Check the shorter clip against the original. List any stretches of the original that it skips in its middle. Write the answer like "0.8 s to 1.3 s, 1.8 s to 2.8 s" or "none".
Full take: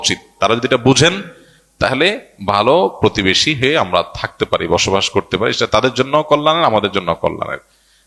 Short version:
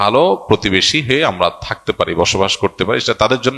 none